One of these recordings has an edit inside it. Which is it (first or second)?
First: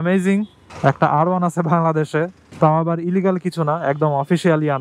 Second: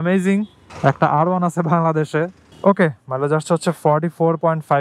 second